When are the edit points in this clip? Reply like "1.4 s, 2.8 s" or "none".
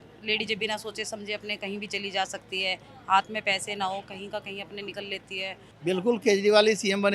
5.7 s